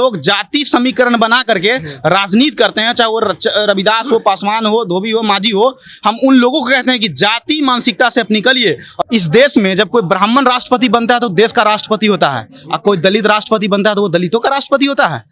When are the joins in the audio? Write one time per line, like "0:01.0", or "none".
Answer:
0:08.9